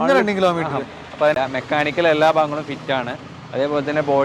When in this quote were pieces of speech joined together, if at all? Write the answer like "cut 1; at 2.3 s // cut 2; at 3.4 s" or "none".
cut 1; at 1.4 s